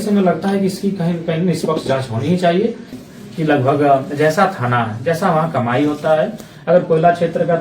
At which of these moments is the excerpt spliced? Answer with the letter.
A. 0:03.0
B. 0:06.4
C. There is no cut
A